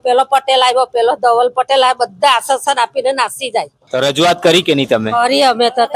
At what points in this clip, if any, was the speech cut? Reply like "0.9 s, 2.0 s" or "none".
3.8 s